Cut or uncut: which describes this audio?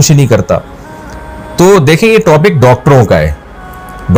uncut